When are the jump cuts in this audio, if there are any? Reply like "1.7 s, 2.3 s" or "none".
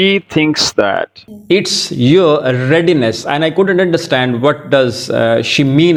none